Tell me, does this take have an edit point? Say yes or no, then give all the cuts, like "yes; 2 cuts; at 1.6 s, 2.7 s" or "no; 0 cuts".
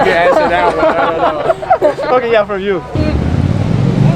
yes; 1 cut; at 2.9 s